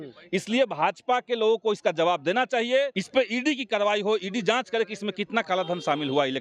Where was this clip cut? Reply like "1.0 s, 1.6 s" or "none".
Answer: 3.0 s